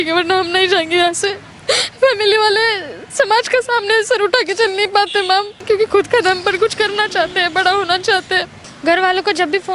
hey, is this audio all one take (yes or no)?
no